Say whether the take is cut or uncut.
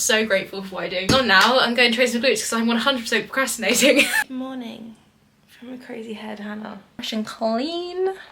cut